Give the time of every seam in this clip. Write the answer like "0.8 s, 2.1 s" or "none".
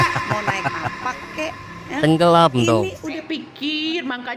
3.1 s

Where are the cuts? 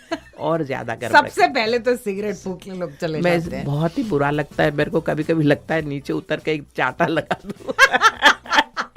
none

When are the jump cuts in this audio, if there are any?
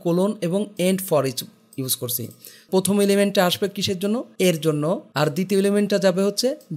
2.7 s, 4.3 s, 5.1 s

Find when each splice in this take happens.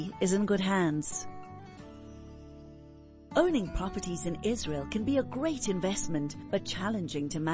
1.1 s, 3.2 s

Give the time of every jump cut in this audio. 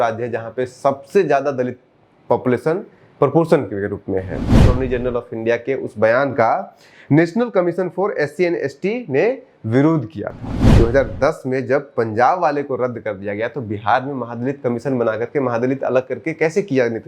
4.7 s, 10.7 s

